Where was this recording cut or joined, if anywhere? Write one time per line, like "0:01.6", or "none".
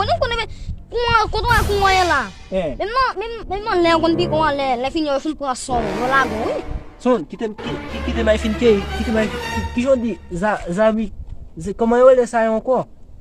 none